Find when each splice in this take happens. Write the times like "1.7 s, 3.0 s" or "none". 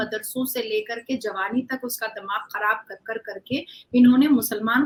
none